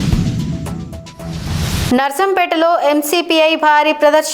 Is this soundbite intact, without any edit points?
no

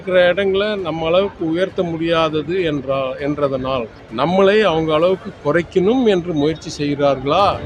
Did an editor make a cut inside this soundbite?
yes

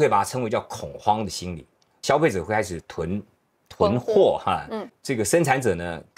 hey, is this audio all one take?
no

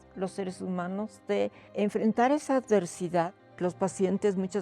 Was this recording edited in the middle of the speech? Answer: yes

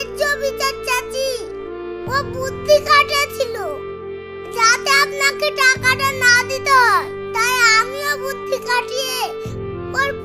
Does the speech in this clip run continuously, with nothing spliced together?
yes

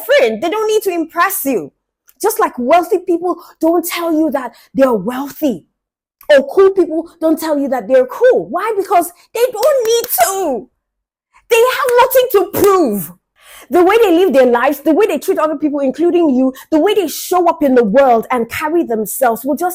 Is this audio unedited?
yes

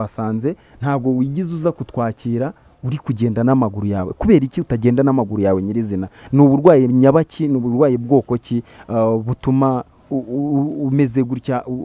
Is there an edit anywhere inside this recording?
no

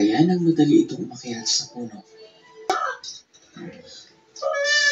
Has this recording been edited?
yes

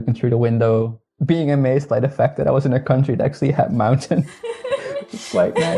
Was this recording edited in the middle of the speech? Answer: yes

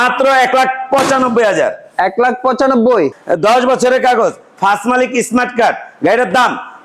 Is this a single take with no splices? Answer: no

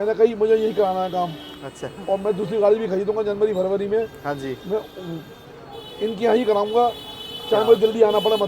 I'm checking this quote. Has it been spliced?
no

